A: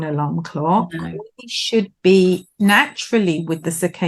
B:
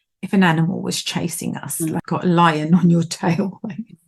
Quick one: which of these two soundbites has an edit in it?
B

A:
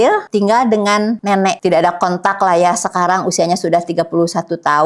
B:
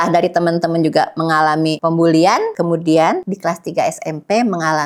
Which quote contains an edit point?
A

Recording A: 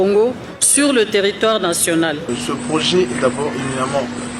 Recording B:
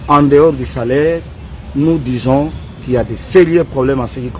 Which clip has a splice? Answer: A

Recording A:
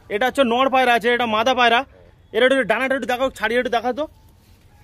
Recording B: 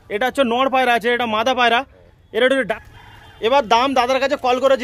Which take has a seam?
B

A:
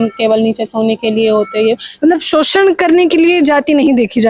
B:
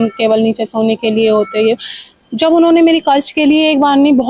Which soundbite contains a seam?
A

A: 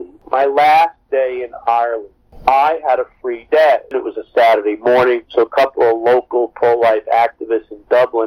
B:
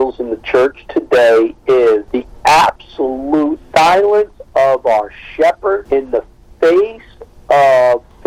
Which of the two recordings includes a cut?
A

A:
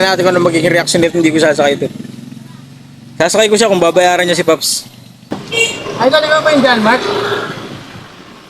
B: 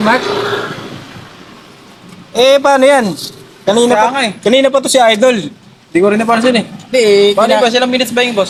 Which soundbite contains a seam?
A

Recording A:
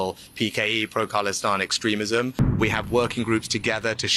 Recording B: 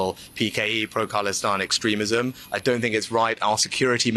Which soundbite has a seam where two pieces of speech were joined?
A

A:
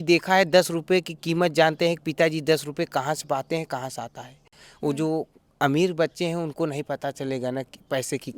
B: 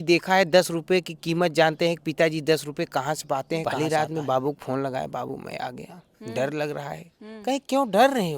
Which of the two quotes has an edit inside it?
B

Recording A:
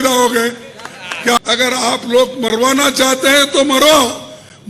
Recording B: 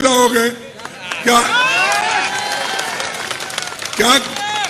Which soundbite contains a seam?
A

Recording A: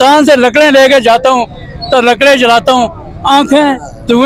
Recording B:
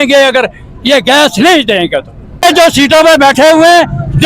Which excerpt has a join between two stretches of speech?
B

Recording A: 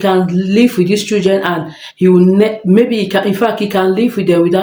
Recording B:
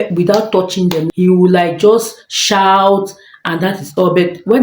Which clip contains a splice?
B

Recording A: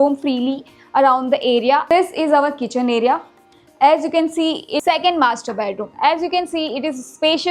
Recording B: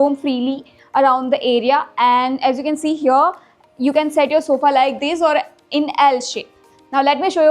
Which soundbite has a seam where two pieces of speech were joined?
A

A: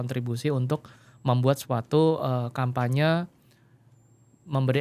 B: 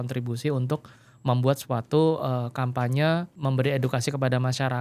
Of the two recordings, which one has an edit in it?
B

